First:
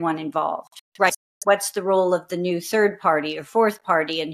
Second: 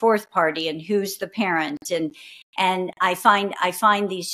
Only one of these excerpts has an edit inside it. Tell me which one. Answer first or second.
first